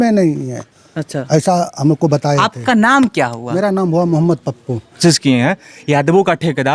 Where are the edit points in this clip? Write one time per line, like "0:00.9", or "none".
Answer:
0:05.0